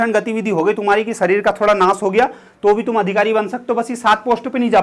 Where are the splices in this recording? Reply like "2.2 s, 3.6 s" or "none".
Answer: none